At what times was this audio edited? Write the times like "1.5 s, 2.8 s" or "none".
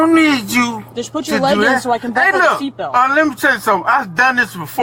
none